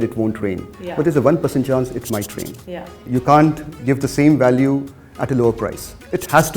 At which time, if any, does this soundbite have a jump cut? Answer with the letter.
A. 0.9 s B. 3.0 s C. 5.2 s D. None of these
B